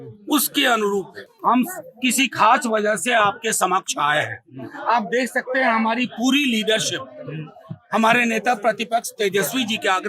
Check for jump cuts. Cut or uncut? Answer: cut